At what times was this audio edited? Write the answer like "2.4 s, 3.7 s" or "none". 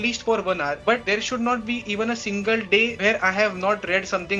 0.9 s, 2.9 s